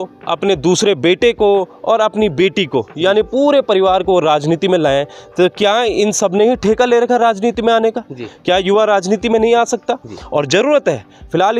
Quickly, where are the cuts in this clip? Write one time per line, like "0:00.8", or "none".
none